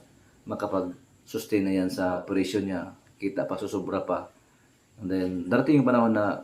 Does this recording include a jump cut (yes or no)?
yes